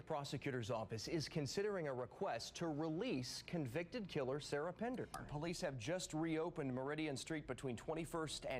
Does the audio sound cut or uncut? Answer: cut